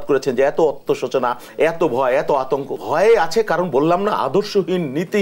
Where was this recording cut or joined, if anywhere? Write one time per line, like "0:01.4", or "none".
0:02.8